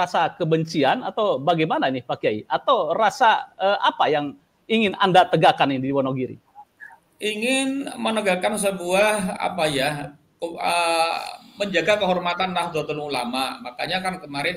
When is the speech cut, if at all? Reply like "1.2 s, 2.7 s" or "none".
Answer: none

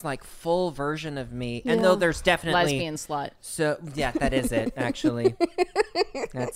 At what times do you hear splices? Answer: none

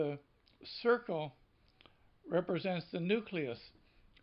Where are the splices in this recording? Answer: none

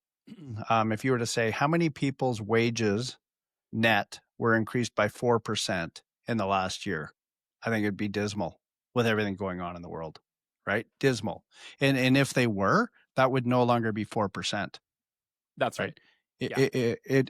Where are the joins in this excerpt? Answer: none

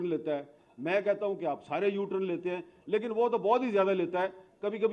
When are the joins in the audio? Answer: none

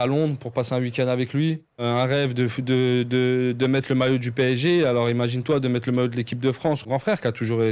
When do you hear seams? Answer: 1.8 s, 6.9 s

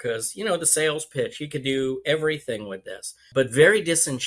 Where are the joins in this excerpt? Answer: 3.3 s

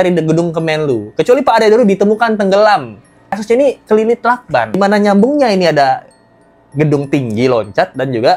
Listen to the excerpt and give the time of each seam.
3.4 s, 4.8 s

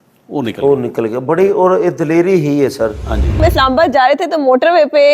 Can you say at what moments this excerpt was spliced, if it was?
3.4 s

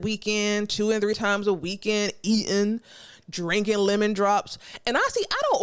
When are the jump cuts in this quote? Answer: none

